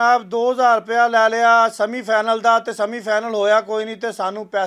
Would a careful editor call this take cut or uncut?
uncut